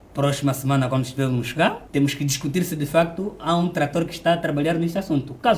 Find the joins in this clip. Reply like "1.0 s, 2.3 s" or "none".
1.8 s